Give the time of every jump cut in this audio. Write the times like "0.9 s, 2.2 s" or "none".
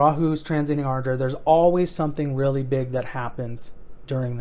none

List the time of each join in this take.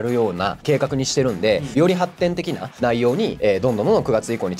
1.7 s

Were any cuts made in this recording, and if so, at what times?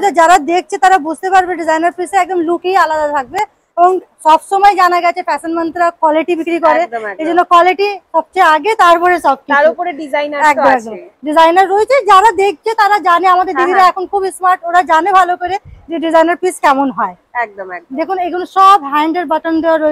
none

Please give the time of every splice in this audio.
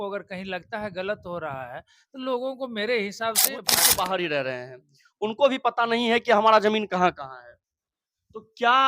3.8 s

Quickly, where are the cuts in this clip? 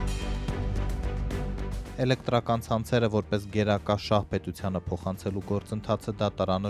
1.9 s

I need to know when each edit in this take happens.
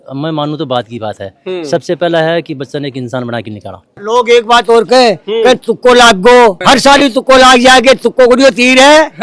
4.0 s

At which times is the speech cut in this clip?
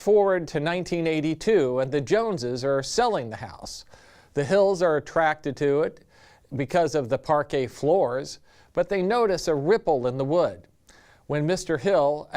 2.2 s

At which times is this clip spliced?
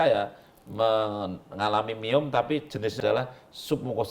3.0 s

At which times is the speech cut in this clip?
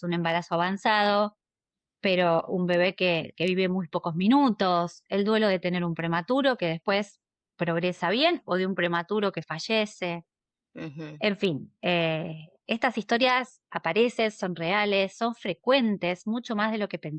none

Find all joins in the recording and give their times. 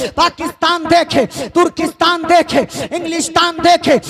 none

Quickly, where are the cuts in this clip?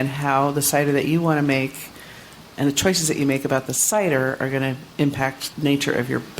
5.4 s

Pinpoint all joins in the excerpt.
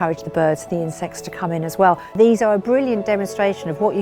2.1 s

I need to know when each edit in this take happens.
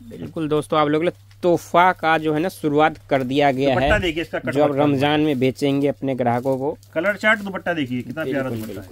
none

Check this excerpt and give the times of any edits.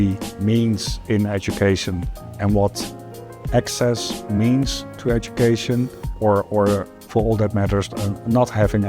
3.4 s, 6.0 s, 6.9 s

